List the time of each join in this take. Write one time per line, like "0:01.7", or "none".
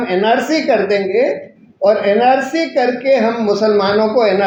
none